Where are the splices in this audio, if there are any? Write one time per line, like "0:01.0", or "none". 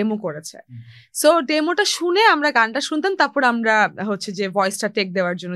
none